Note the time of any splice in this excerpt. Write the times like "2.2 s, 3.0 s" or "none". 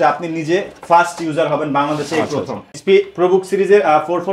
2.8 s